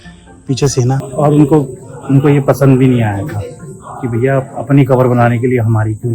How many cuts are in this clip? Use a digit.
1